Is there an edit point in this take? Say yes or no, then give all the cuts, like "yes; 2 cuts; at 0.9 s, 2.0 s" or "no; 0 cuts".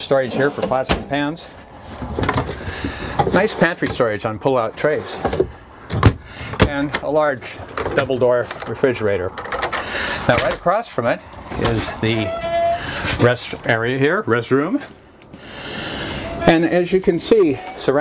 no; 0 cuts